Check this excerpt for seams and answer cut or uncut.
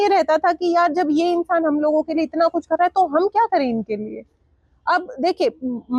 uncut